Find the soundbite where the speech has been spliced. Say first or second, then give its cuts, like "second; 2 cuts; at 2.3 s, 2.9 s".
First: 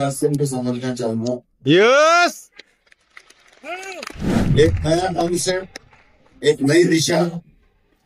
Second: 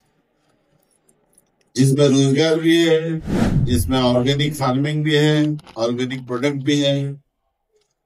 first; 1 cut; at 4.4 s